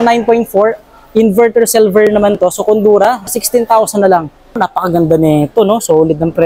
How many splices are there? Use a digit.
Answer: 2